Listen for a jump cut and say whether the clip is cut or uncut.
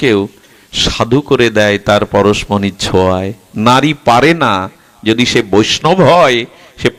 uncut